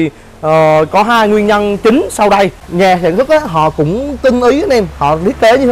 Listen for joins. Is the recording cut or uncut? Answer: cut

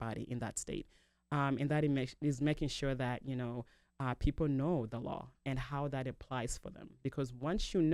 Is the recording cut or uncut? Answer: uncut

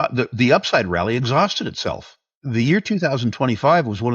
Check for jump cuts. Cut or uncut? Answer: cut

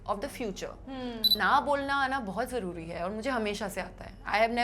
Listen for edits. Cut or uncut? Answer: cut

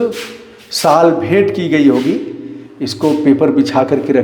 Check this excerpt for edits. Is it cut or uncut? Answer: uncut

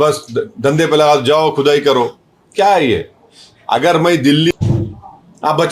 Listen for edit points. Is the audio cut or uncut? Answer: cut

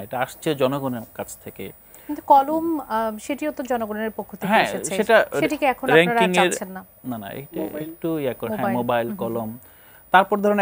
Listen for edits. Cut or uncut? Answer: uncut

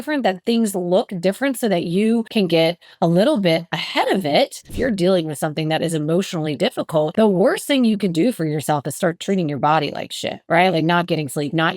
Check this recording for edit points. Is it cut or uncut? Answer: cut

